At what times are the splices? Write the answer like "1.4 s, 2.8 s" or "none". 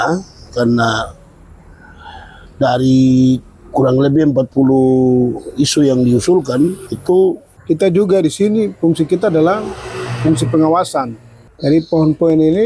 6.9 s, 7.5 s, 11.4 s